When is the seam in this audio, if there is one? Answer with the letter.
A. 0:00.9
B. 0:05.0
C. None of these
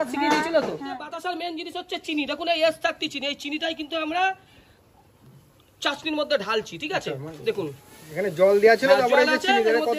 A